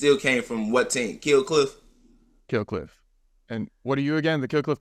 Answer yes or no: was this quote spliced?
no